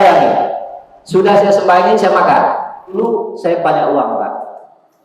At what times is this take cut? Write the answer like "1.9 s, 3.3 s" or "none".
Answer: 3.0 s